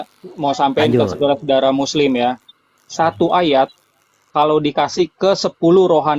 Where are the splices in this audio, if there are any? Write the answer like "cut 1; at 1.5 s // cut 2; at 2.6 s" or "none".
none